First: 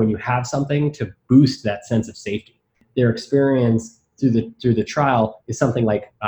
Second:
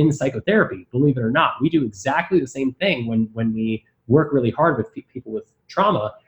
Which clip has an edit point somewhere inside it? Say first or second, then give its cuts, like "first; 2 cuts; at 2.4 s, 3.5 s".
first; 1 cut; at 2.8 s